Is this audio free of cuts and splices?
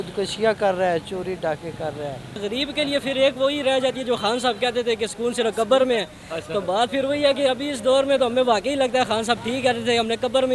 no; 1 cut; at 2.4 s

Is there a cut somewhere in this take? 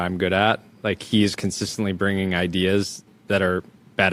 no; 0 cuts

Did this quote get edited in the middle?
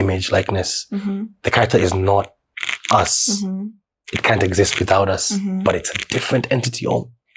no; 0 cuts

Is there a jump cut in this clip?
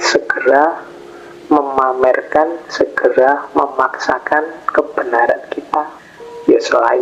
yes; 1 cut; at 5.9 s

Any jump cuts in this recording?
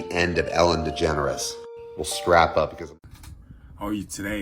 yes; 1 cut; at 2.8 s

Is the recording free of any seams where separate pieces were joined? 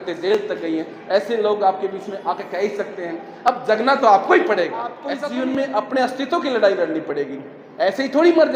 no; 1 cut; at 5.0 s

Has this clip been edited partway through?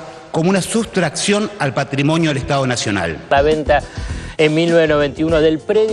yes; 1 cut; at 3.2 s

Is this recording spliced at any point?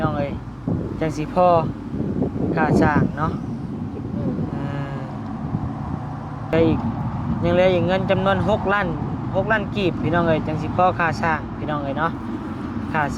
yes; 1 cut; at 6.5 s

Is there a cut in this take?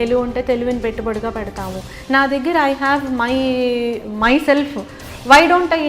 yes; 1 cut; at 1.9 s

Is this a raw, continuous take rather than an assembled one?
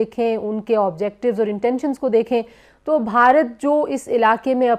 yes; 0 cuts

